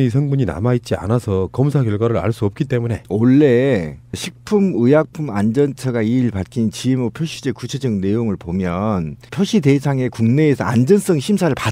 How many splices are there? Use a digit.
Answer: 1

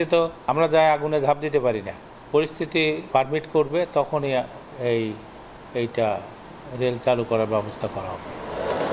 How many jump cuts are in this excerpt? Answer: 0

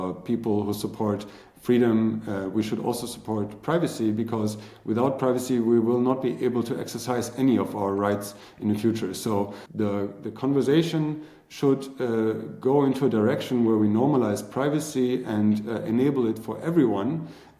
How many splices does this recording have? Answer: 1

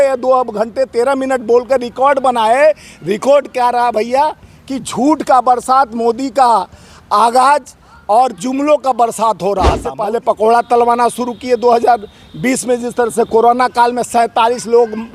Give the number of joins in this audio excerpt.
1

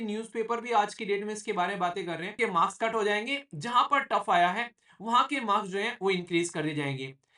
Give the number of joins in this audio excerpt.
1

